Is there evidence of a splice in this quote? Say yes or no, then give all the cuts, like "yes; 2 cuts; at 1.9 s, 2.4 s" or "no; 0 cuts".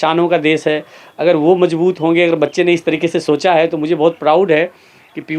no; 0 cuts